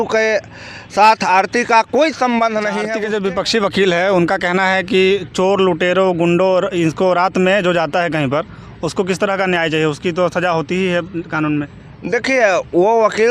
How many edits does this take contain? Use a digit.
1